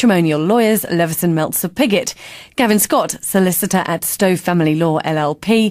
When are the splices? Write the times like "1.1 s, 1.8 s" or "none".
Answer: 4.5 s